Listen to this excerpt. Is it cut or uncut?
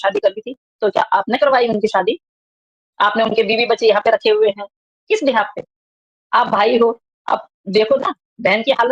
uncut